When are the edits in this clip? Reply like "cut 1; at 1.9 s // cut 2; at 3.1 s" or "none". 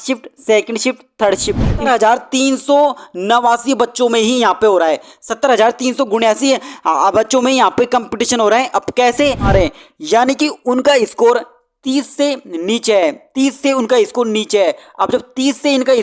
cut 1; at 1.9 s // cut 2; at 9.5 s